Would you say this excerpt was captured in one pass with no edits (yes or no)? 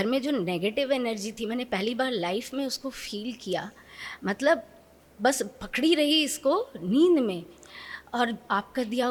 yes